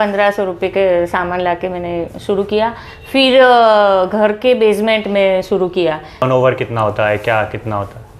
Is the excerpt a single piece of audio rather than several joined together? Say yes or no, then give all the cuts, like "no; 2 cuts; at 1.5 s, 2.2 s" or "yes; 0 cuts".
no; 1 cut; at 6.2 s